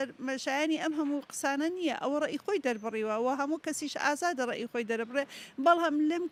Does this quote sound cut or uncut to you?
uncut